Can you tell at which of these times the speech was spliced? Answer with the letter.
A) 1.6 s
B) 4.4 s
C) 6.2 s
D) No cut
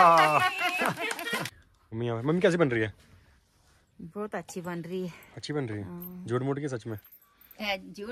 A